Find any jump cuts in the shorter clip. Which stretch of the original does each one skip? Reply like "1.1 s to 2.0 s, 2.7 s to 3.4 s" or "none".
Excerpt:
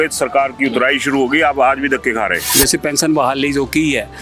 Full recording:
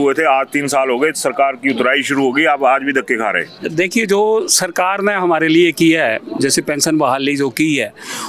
3.5 s to 6.3 s